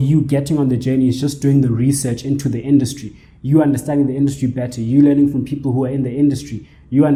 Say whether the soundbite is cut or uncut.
uncut